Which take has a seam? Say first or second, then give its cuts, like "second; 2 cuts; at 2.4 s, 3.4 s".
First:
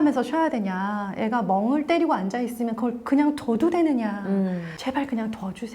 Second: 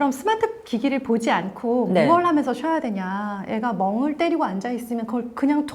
first; 1 cut; at 4.7 s